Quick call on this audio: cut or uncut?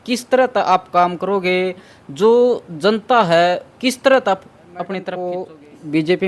cut